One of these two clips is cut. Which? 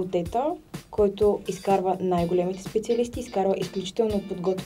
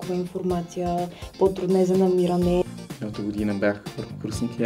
second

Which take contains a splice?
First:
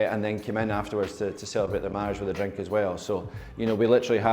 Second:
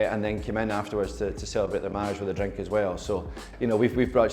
second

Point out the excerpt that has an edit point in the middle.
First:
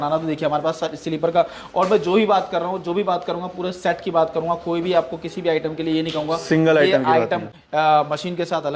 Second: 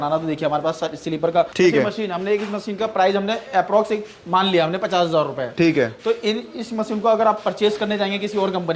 second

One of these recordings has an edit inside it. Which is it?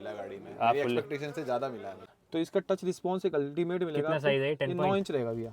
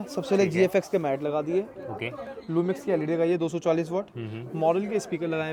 first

